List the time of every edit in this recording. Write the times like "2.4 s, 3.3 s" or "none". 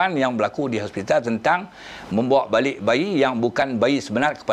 none